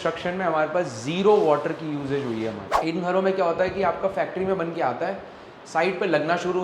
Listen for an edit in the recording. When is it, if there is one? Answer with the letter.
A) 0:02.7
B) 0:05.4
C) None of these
A